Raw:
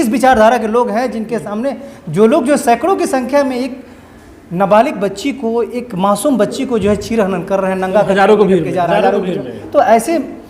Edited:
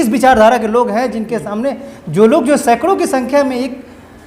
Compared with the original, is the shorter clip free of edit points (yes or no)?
yes